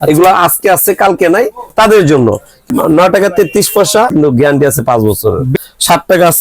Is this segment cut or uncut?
cut